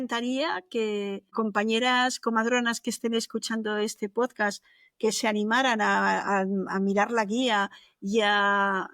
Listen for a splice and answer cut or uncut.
cut